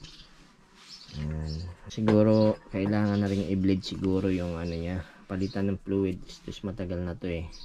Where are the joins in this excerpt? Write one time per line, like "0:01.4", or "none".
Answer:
0:01.9